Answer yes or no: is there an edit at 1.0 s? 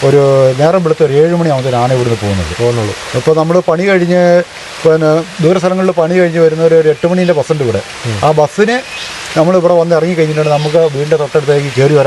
no